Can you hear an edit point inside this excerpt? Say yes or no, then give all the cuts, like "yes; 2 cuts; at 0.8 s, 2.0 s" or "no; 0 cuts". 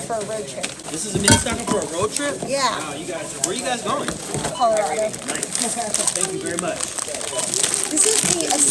no; 0 cuts